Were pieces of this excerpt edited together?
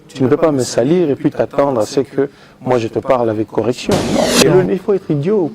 yes; 1 cut; at 4.4 s

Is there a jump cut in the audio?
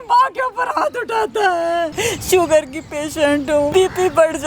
yes; 2 cuts; at 1.9 s, 3.7 s

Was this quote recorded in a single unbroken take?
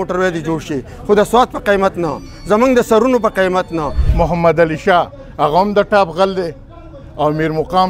no; 1 cut; at 4.0 s

